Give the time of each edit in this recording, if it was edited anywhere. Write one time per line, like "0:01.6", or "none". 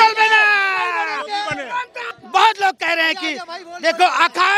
0:02.0